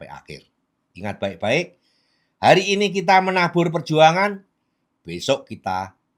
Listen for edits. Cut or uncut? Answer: uncut